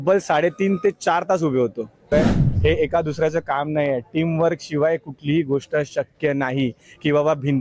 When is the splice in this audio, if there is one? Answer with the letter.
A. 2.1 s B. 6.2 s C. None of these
A